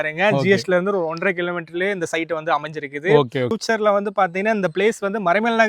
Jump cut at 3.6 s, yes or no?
yes